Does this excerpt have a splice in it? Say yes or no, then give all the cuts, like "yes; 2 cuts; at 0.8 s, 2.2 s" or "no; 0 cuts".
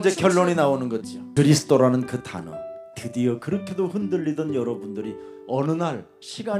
no; 0 cuts